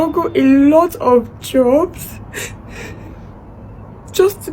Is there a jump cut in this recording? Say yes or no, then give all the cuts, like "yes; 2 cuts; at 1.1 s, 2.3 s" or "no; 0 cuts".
no; 0 cuts